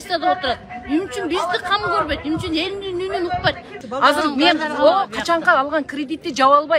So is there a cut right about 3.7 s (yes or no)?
yes